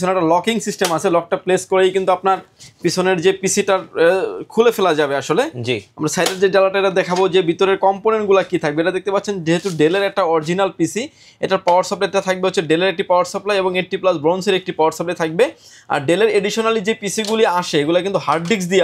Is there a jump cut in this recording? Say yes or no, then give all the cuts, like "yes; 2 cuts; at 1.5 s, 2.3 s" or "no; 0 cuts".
no; 0 cuts